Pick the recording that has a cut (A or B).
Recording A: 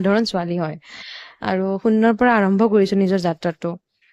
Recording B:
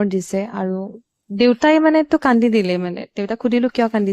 B